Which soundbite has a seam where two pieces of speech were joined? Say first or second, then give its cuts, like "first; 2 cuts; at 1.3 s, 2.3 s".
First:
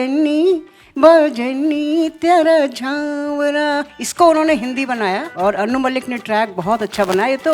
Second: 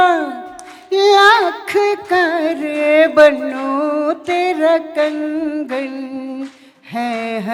first; 2 cuts; at 4.0 s, 5.3 s